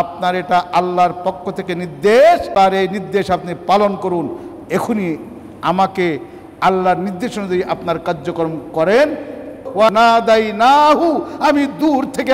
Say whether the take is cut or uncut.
cut